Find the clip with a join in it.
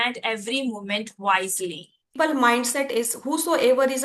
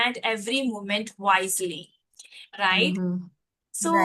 first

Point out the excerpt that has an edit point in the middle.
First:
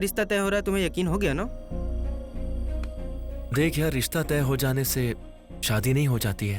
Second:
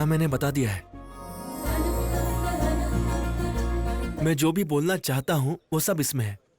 second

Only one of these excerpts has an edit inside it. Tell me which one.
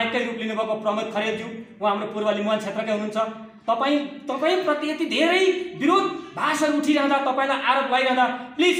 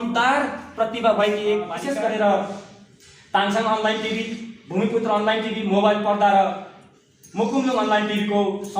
second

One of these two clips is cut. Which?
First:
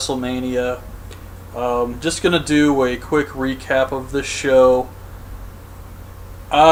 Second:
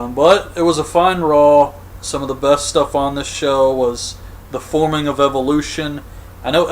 second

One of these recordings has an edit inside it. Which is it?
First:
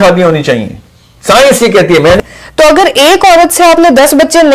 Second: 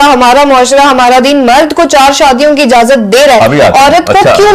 first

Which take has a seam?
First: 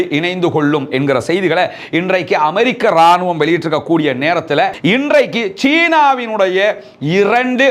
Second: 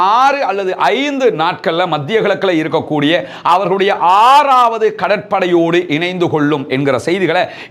first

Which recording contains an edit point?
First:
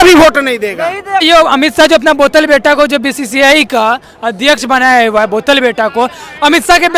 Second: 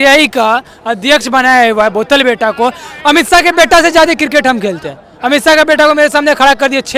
first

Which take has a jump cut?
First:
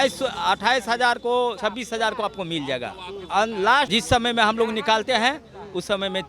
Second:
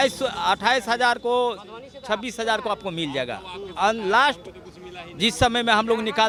first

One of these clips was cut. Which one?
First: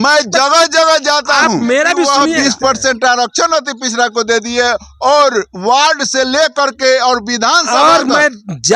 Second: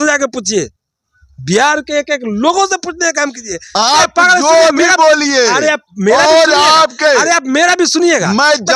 first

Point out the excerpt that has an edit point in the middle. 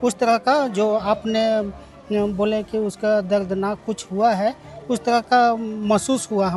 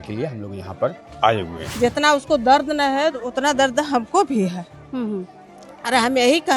second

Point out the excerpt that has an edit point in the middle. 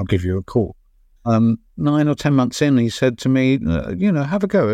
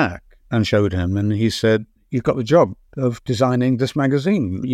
first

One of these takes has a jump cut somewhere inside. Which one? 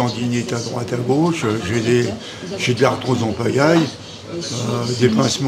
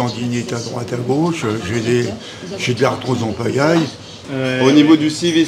second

